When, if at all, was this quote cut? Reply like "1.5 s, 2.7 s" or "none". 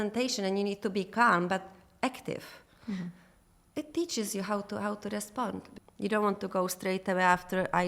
5.7 s